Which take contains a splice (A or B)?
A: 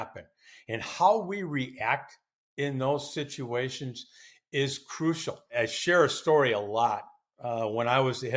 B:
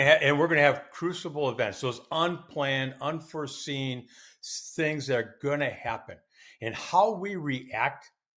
A